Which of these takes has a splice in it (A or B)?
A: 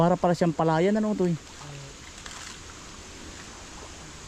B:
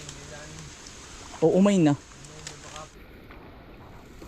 B